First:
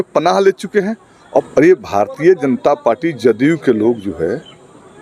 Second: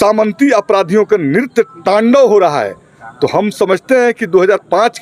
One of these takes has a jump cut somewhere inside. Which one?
first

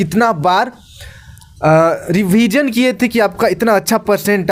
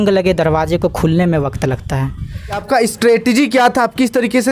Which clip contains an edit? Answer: second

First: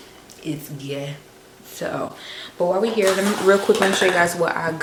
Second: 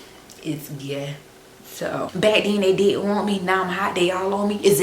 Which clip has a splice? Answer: second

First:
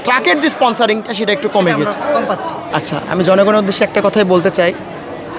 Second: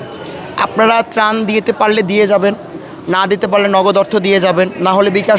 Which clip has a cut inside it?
first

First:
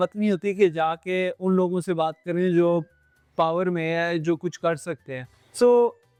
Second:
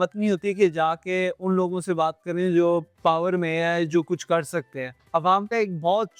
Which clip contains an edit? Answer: second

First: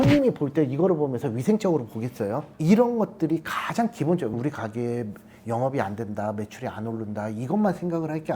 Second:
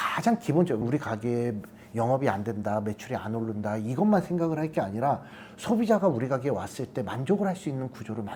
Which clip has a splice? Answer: first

